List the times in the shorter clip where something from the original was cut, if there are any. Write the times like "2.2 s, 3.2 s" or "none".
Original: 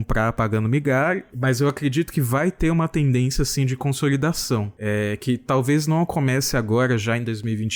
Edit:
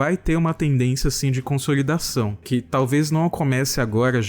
2.4 s